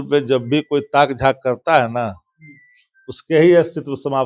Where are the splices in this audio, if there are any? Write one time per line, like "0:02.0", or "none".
none